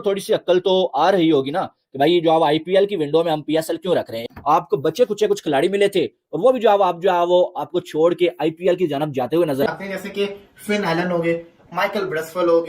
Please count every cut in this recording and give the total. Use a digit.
1